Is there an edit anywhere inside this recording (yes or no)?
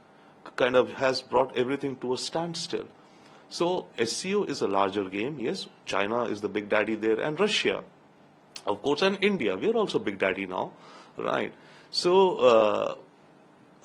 no